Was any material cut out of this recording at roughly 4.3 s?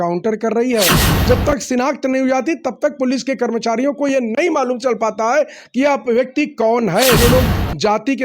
no; 2 cuts; at 1.1 s, 7.2 s

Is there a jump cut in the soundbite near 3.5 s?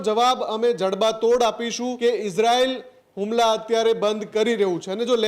no; 1 cut; at 1.9 s

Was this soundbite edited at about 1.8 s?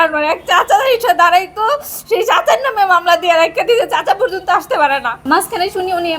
no; 1 cut; at 5.2 s

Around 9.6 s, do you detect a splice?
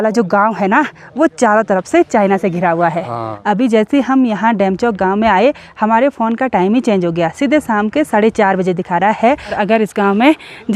yes; 2 cuts; at 3.3 s, 9.6 s

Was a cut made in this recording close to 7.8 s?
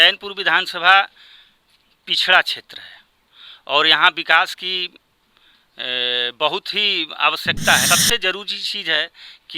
yes; 1 cut; at 7.8 s

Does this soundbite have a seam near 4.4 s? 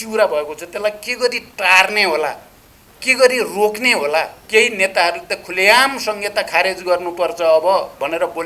yes; 1 cut; at 4.4 s

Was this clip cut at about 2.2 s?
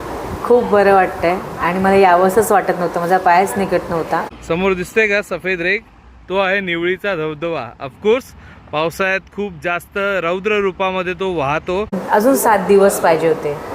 no; 2 cuts; at 4.3 s, 12.0 s

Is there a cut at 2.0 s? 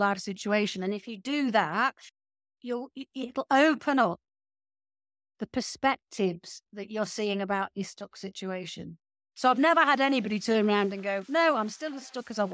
yes; 1 cut; at 2.0 s

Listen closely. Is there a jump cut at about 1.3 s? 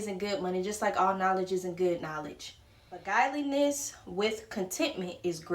no; 1 cut; at 3.0 s

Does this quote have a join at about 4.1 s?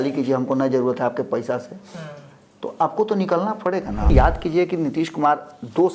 yes; 1 cut; at 4.1 s

